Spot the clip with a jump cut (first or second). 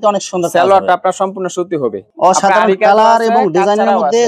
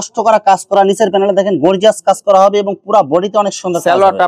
first